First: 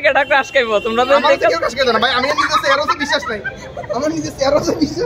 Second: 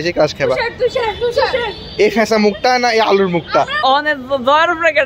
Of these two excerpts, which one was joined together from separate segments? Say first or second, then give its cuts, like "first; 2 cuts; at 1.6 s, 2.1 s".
second; 1 cut; at 3.8 s